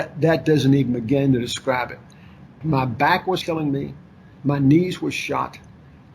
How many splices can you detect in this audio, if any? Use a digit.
1